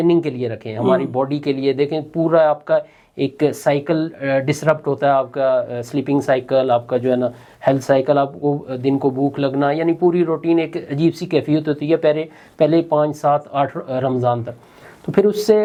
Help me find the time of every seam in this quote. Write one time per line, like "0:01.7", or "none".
none